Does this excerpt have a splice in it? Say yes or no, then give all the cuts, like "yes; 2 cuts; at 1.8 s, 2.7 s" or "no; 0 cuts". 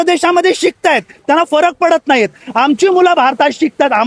no; 0 cuts